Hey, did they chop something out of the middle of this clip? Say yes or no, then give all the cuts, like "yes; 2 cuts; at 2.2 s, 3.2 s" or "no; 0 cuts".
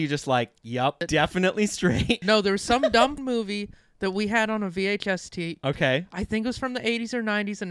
yes; 3 cuts; at 1.0 s, 2.2 s, 3.2 s